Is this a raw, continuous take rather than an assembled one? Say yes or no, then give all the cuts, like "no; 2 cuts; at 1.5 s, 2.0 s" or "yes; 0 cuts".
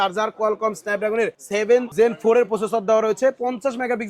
no; 1 cut; at 1.8 s